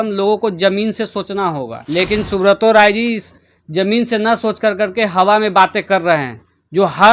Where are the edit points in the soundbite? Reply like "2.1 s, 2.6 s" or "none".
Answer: 1.8 s